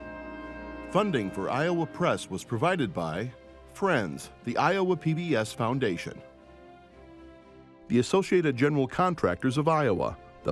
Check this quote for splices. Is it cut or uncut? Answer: cut